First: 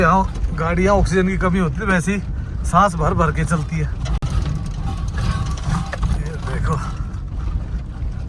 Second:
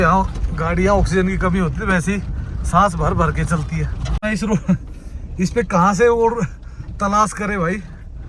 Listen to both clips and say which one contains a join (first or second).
second